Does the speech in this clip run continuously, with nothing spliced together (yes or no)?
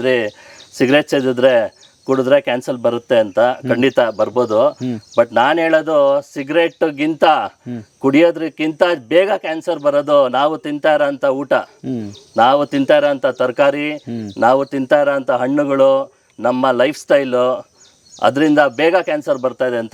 yes